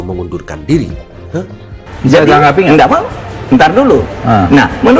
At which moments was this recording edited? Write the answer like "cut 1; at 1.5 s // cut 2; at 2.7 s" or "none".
cut 1; at 1.6 s